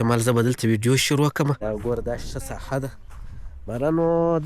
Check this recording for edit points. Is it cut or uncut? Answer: cut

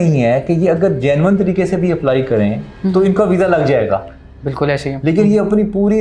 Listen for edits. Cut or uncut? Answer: uncut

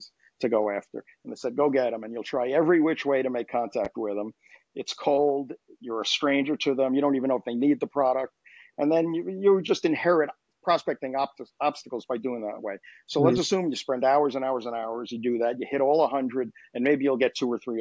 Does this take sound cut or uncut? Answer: uncut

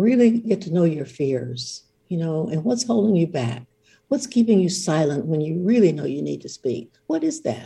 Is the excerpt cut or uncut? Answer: uncut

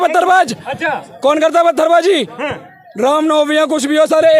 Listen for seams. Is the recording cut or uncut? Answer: uncut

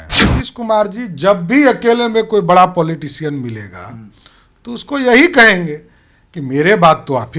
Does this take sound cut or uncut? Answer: uncut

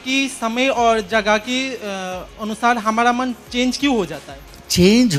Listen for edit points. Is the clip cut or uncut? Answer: uncut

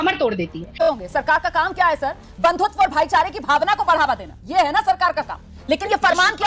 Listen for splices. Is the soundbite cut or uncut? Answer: cut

